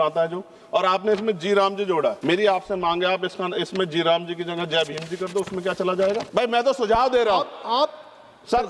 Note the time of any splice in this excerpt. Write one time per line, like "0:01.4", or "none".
0:02.2
0:06.3